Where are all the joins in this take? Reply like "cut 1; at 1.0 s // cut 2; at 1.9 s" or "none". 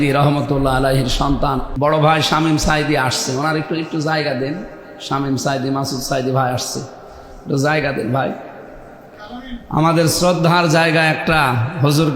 cut 1; at 1.7 s